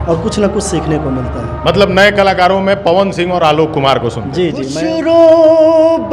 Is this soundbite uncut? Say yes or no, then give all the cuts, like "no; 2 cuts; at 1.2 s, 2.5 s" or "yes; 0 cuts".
no; 1 cut; at 4.8 s